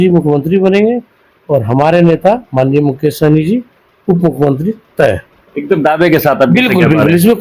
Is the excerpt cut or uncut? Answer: uncut